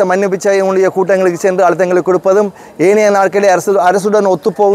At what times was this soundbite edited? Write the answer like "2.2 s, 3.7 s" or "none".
none

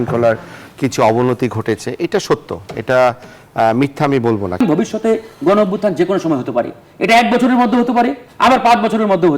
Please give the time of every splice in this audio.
4.6 s

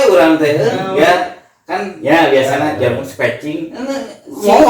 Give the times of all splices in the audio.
none

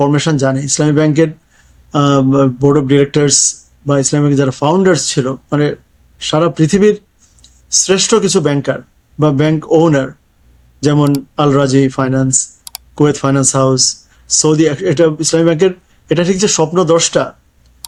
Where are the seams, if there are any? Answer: none

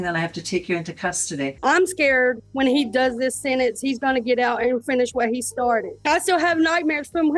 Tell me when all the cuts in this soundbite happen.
1.5 s, 5.9 s

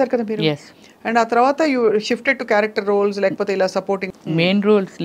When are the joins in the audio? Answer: 4.1 s

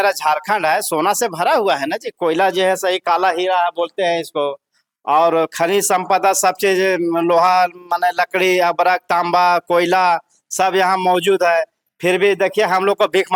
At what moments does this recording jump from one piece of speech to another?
none

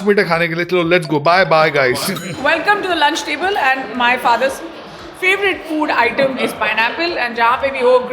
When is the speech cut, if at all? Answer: none

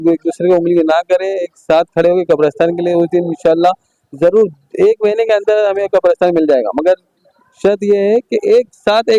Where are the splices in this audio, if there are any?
none

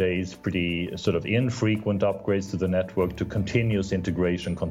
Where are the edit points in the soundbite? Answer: none

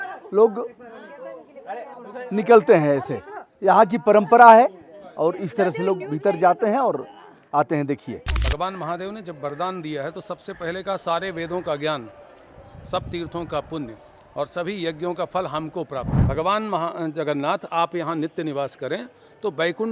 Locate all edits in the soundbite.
8.4 s, 16.2 s

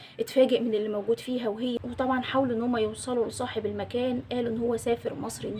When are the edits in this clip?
1.7 s

